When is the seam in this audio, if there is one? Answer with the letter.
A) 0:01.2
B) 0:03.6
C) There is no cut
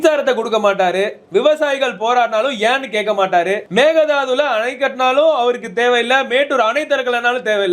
B